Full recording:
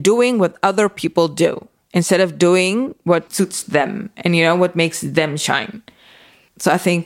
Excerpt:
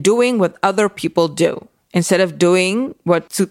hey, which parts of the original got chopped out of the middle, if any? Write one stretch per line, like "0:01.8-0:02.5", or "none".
none